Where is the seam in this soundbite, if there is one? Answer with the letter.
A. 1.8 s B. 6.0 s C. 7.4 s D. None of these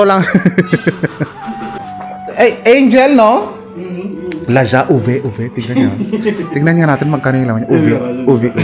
A